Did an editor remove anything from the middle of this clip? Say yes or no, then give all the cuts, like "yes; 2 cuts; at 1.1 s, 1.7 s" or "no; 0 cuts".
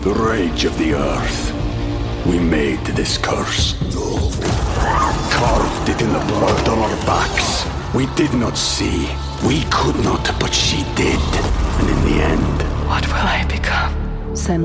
no; 0 cuts